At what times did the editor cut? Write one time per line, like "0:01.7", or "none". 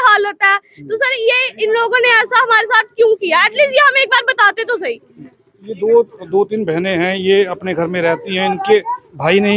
none